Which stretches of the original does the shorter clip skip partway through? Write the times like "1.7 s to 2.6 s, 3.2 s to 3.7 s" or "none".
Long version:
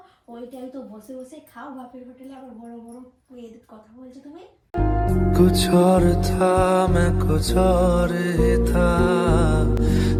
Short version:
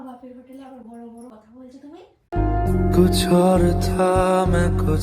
3.0 s to 3.7 s